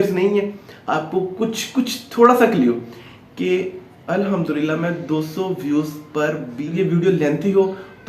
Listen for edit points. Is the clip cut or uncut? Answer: cut